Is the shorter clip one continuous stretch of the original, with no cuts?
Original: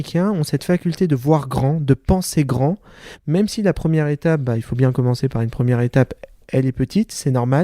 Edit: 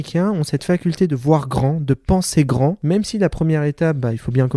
no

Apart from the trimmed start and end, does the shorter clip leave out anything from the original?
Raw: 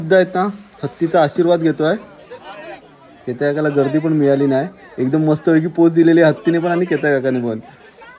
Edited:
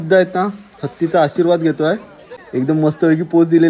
yes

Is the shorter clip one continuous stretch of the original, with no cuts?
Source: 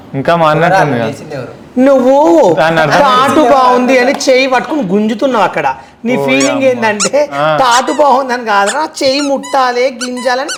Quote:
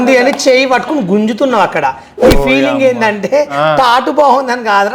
yes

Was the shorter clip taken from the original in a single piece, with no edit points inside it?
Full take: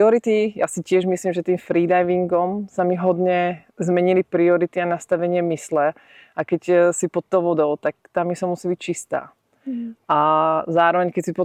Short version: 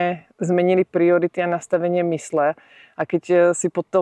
yes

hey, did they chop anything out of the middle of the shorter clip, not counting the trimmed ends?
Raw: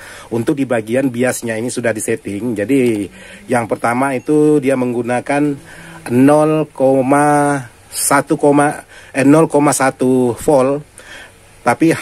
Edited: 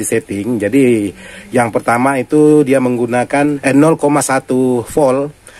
yes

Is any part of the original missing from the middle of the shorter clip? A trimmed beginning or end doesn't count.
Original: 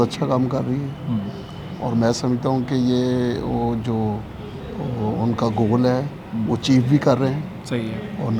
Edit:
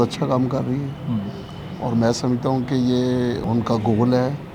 yes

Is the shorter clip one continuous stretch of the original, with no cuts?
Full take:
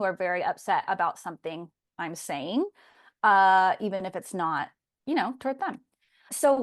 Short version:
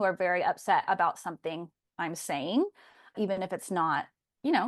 no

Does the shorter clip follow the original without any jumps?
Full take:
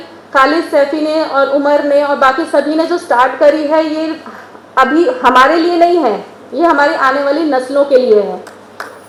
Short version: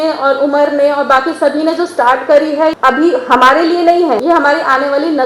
no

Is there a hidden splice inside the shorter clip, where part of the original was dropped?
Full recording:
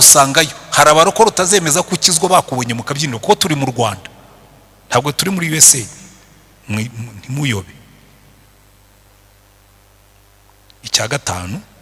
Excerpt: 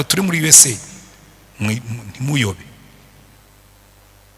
no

